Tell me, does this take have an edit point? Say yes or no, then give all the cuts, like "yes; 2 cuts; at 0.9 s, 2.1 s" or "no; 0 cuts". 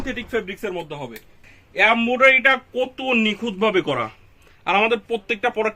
yes; 1 cut; at 1.5 s